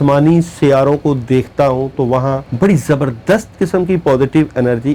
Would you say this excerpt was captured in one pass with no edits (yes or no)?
no